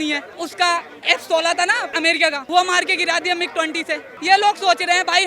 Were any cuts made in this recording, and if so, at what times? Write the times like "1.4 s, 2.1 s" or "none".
2.4 s, 4.1 s